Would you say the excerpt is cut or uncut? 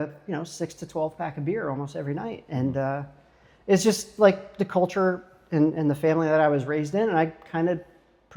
uncut